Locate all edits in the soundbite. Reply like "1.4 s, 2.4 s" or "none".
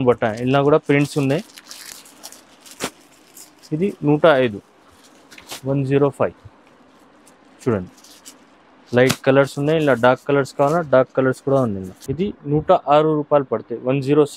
none